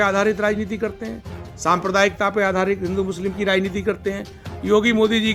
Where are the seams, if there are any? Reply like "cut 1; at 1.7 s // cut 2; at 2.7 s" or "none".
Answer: none